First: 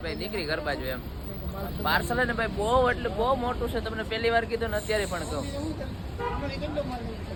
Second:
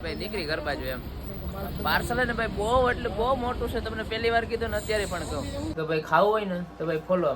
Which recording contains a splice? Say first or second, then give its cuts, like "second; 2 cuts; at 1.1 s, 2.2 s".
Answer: second; 1 cut; at 5.7 s